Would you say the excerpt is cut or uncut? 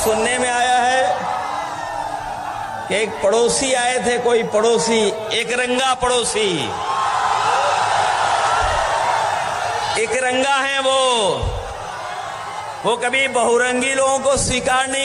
uncut